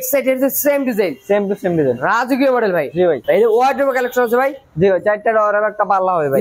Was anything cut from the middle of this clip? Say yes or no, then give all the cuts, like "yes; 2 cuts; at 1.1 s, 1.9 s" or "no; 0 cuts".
yes; 1 cut; at 3.2 s